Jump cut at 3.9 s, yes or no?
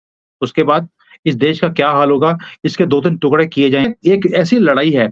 yes